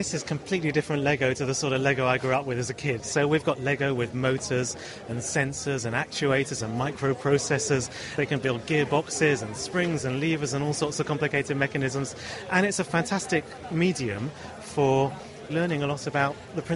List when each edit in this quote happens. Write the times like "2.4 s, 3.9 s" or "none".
3.0 s, 8.1 s, 15.5 s